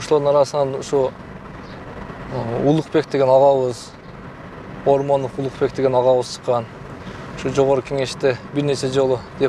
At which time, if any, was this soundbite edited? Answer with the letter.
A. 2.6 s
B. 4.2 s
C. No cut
C